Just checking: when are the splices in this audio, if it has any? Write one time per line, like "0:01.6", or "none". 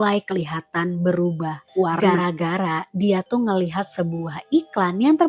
0:02.1